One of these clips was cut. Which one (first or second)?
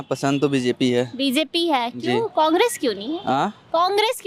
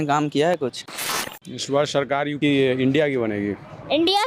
second